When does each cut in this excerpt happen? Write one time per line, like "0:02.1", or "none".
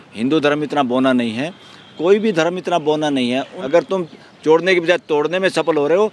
0:03.5